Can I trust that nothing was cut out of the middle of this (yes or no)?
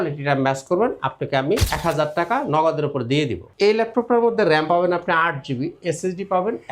no